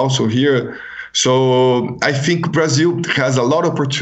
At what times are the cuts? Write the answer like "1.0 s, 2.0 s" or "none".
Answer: none